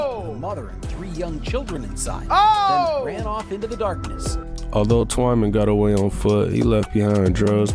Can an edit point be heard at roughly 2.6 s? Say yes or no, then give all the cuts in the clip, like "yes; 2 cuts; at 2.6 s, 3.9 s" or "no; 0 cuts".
no; 0 cuts